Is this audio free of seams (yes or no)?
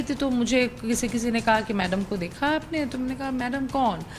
yes